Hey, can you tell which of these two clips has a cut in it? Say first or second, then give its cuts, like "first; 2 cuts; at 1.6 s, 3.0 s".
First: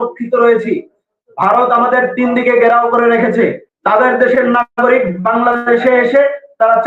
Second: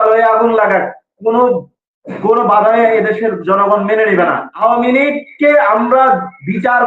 second; 1 cut; at 4.5 s